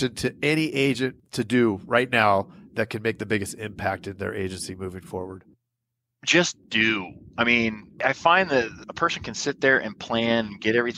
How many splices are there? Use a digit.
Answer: 0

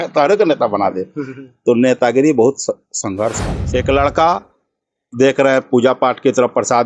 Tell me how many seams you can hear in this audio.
1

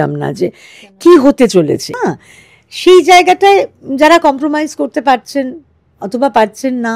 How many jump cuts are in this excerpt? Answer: 1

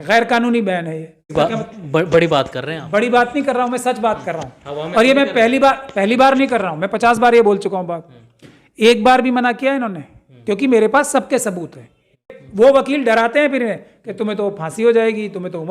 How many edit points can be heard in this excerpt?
2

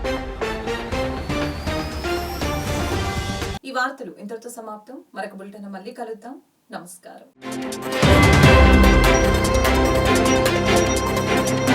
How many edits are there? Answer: 0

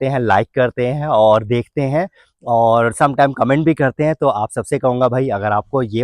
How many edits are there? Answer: 0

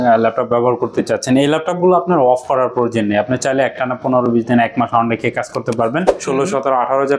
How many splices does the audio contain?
1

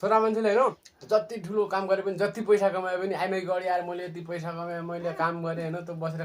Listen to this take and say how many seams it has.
1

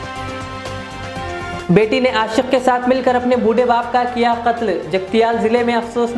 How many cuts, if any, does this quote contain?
1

